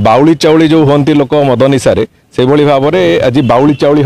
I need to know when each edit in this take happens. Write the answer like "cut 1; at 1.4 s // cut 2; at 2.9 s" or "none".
none